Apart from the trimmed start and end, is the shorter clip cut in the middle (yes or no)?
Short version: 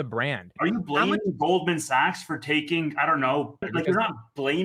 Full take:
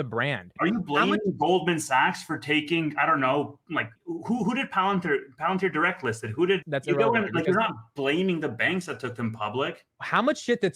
yes